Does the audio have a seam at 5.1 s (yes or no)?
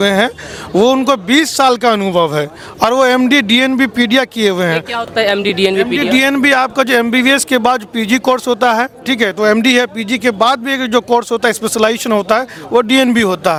no